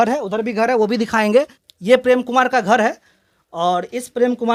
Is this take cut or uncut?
uncut